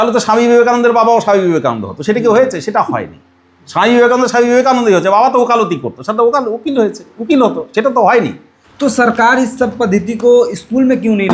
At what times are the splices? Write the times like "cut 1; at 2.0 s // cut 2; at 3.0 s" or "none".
none